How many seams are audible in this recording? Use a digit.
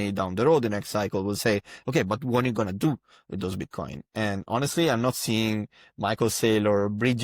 0